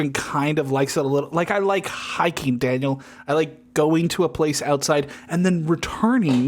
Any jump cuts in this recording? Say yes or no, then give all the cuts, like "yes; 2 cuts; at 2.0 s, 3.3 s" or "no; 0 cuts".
no; 0 cuts